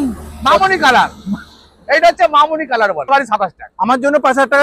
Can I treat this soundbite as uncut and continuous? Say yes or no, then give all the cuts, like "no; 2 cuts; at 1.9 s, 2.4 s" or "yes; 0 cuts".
no; 1 cut; at 3.1 s